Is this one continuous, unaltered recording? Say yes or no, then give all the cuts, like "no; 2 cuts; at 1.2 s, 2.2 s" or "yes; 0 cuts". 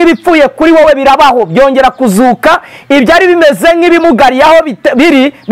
yes; 0 cuts